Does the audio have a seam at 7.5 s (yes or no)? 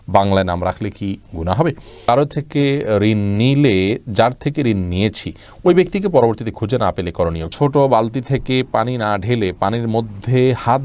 yes